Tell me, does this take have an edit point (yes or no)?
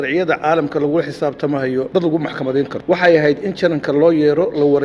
yes